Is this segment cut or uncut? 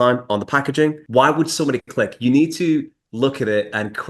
cut